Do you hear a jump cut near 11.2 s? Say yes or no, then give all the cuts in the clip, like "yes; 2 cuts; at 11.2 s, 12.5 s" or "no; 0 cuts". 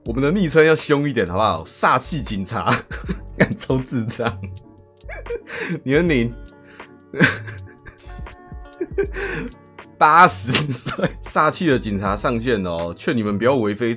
yes; 1 cut; at 11.2 s